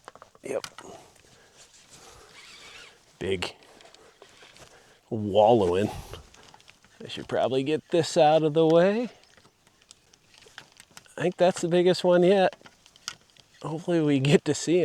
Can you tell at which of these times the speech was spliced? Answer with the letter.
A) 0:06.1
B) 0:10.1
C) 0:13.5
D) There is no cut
B